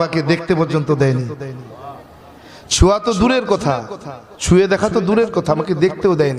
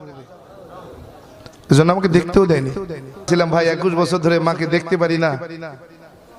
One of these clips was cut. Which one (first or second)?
second